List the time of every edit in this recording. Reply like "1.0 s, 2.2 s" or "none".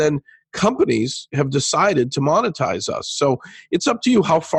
none